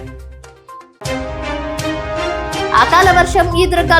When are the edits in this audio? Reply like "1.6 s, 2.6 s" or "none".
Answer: 2.7 s